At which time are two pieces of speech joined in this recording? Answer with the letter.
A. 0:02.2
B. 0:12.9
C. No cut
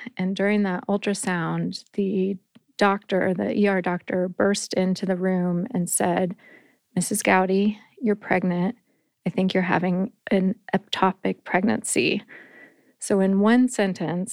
C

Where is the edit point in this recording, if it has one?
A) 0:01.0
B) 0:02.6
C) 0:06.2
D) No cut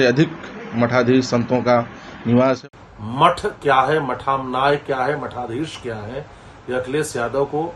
B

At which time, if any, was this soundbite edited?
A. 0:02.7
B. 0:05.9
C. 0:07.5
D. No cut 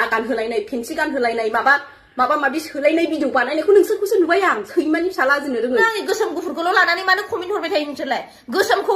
B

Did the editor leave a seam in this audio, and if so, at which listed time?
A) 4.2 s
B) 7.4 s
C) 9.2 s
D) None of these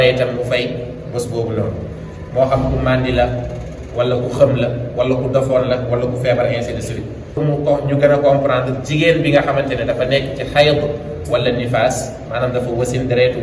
B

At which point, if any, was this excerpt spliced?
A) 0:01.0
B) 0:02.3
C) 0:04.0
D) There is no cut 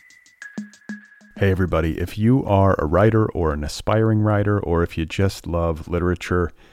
A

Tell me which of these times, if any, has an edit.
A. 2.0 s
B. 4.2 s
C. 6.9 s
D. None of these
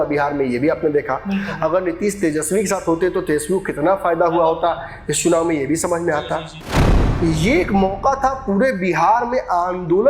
C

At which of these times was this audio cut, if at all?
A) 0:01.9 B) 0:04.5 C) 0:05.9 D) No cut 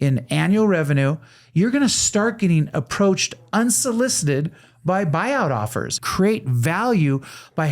C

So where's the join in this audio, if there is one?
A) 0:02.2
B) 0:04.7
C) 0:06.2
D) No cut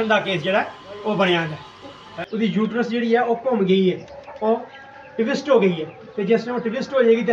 A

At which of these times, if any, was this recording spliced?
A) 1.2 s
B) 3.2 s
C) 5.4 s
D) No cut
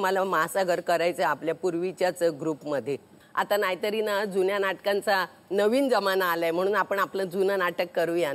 B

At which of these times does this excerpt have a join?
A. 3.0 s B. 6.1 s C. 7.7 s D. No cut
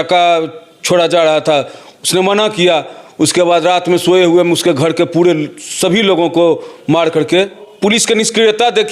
C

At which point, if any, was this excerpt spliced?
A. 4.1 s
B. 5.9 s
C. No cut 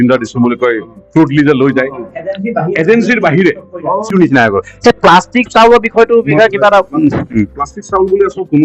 A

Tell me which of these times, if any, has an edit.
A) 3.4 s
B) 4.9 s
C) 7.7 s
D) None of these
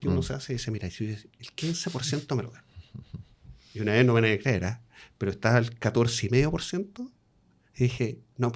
D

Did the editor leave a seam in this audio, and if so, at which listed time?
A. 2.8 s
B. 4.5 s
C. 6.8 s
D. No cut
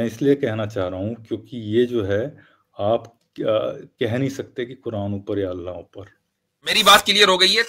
C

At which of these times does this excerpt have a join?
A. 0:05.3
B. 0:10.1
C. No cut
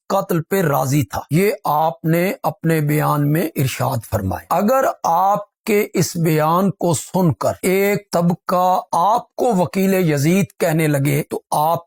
C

